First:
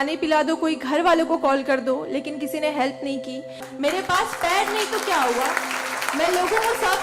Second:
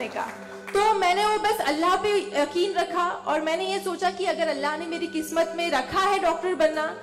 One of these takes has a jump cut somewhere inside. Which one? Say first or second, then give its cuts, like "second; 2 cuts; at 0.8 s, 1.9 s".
first; 1 cut; at 3.7 s